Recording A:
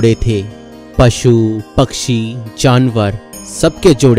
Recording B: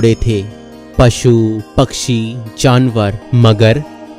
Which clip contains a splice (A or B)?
B